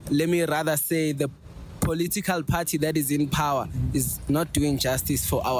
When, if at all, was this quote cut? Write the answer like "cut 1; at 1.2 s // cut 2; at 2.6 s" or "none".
none